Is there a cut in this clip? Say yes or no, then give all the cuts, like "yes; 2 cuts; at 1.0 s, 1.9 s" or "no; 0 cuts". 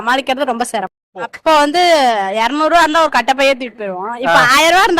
yes; 1 cut; at 1.3 s